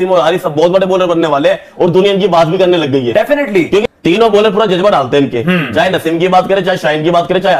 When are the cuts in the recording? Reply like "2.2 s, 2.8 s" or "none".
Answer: 3.9 s